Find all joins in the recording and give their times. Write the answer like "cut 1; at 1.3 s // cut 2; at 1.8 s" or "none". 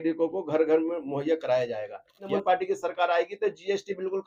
cut 1; at 2.3 s